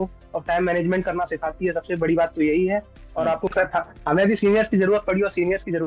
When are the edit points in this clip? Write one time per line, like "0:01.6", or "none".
0:03.5